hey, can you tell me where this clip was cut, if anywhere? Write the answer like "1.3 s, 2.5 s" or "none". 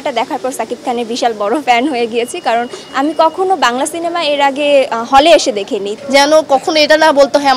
5.9 s